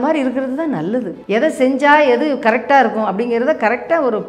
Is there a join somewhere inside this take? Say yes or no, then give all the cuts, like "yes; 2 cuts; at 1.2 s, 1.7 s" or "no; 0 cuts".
yes; 1 cut; at 1.2 s